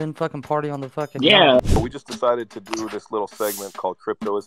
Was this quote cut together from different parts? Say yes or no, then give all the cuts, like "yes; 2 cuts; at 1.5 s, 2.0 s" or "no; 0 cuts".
yes; 1 cut; at 1.6 s